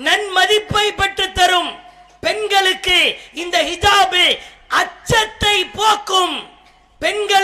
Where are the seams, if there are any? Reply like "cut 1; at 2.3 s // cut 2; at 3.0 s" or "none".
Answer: none